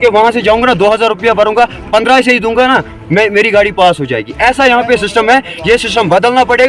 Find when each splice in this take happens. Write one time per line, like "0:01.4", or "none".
none

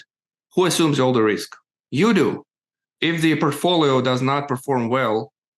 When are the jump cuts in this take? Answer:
0:02.9

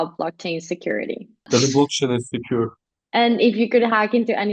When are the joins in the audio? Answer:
0:01.5
0:02.8

